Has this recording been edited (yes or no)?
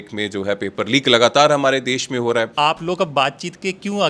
yes